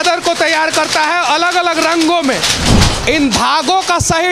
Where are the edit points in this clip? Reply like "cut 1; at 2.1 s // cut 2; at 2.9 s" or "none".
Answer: cut 1; at 2.6 s